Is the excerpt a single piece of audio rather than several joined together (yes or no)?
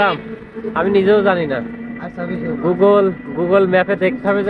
yes